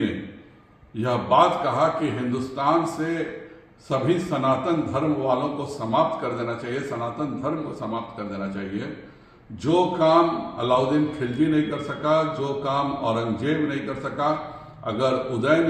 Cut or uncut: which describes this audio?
uncut